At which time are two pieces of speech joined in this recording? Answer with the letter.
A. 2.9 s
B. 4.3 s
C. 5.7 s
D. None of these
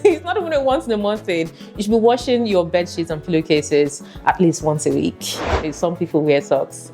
C